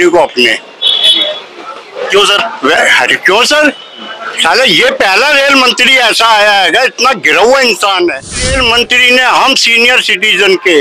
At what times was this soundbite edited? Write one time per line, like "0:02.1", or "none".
0:08.4